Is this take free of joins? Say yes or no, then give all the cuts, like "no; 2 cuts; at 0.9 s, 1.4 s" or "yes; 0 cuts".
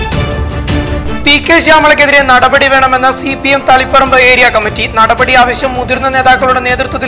no; 1 cut; at 1.0 s